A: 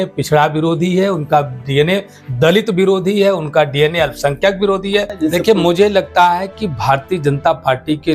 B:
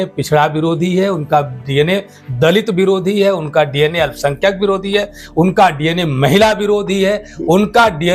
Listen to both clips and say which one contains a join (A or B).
A